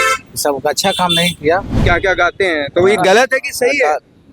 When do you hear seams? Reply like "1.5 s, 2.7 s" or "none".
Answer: 1.8 s